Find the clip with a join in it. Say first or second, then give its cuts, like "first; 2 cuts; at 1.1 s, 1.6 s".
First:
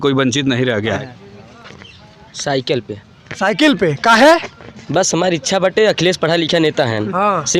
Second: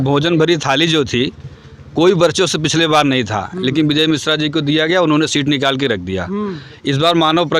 first; 1 cut; at 1.0 s